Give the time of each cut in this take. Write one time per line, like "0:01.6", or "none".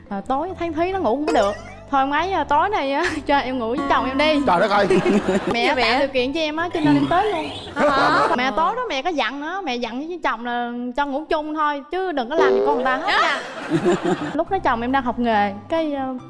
0:05.5
0:08.4
0:14.4